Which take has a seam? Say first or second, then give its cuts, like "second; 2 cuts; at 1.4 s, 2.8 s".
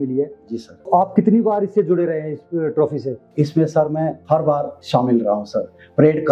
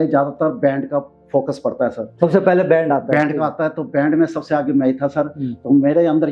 first; 3 cuts; at 0.9 s, 3.2 s, 4.6 s